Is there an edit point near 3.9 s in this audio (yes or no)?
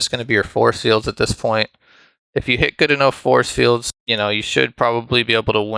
yes